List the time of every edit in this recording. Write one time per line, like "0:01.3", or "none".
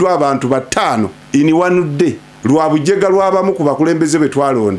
0:01.2
0:02.3